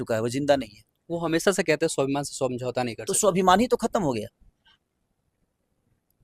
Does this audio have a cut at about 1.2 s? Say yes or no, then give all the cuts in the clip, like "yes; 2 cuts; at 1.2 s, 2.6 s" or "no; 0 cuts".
no; 0 cuts